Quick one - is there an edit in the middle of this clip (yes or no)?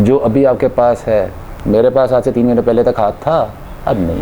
no